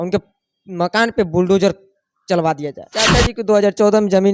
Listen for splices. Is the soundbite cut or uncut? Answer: cut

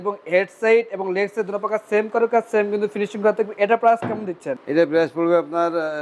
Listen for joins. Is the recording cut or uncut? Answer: uncut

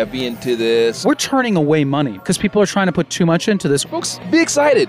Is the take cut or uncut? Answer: cut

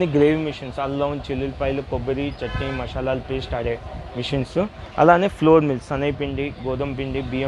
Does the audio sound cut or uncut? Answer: uncut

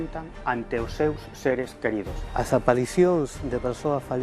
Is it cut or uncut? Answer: cut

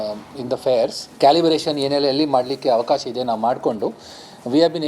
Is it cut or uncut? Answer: cut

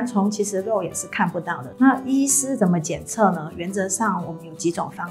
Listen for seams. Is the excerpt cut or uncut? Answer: cut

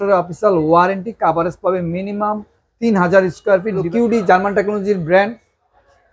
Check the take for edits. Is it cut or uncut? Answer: cut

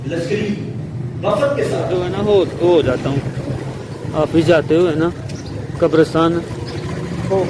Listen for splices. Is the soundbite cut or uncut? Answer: cut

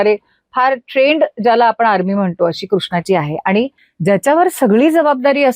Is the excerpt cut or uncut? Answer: cut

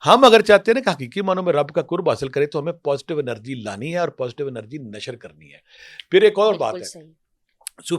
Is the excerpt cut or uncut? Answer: uncut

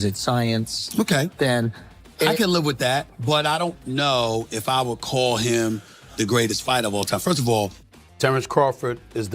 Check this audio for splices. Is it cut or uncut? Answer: cut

